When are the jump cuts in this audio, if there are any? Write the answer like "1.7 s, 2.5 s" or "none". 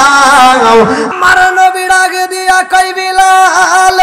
1.1 s